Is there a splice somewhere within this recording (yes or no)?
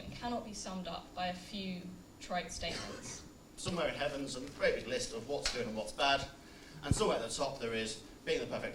yes